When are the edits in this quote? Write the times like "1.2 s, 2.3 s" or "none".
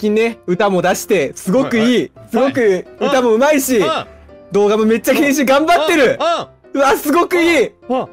none